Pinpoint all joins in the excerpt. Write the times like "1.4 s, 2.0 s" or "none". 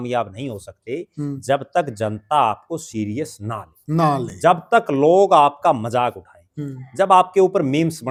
none

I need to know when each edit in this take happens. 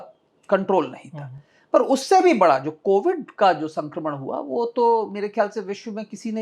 none

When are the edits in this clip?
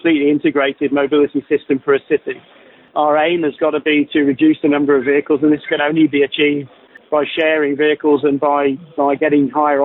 6.9 s

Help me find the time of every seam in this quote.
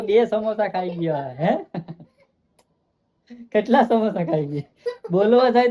none

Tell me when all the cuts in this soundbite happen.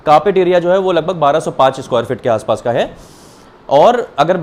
none

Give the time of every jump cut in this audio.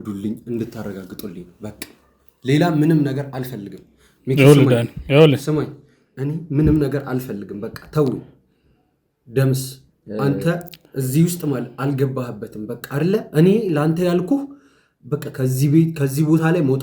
none

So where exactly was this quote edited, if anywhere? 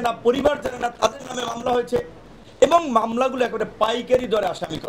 none

